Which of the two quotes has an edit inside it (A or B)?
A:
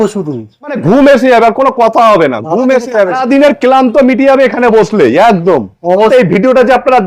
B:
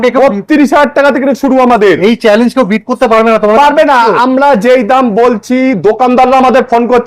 A